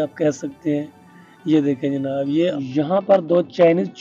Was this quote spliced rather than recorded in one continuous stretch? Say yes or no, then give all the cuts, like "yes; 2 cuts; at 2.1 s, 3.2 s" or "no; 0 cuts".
yes; 1 cut; at 2.5 s